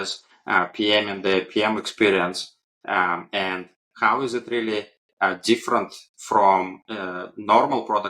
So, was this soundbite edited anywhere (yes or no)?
no